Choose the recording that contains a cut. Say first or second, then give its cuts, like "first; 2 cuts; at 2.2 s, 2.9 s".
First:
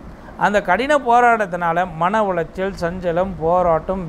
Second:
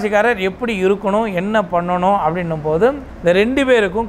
second; 1 cut; at 3.1 s